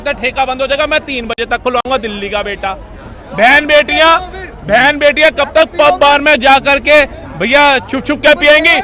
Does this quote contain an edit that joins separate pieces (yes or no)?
no